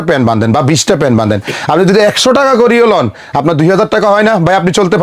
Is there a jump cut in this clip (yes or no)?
no